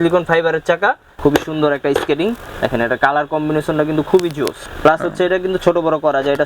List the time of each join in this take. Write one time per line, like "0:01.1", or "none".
0:01.1
0:04.6